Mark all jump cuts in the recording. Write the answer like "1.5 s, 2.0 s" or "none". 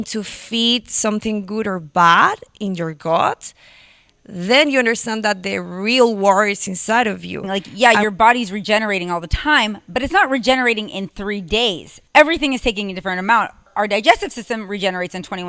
7.6 s, 11.9 s, 13.7 s

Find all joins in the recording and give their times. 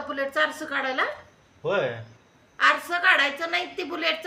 none

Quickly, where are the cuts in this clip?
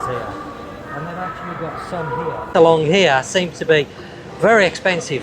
2.5 s

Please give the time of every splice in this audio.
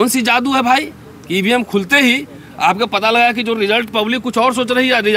none

